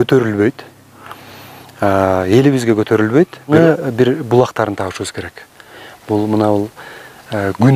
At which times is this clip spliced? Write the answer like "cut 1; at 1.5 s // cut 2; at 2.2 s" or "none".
cut 1; at 3.5 s